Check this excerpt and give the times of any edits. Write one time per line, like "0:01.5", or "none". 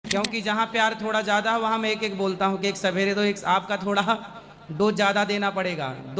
none